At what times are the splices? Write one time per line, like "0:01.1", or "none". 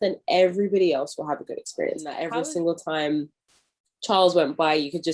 0:02.2